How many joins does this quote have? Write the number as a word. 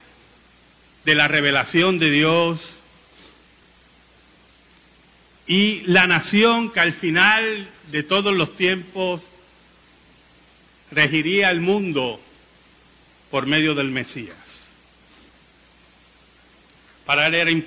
one